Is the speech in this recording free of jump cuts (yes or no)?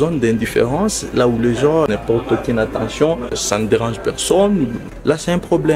no